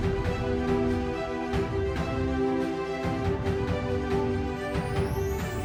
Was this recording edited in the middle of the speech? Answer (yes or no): no